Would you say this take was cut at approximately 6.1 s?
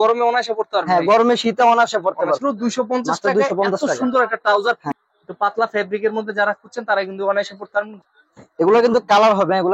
no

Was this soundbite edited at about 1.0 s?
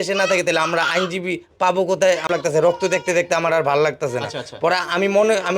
no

